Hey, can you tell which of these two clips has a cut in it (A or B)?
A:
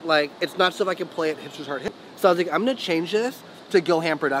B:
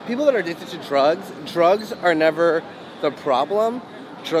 A